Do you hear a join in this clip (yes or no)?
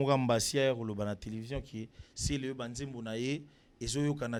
no